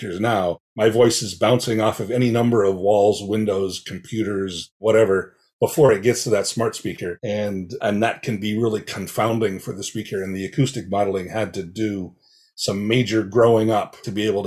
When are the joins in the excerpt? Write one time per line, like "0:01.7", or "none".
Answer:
none